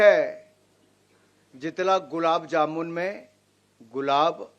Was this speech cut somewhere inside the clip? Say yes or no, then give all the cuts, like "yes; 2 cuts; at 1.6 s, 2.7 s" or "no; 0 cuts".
no; 0 cuts